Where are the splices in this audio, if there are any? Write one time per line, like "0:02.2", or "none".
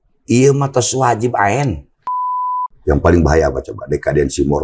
0:02.4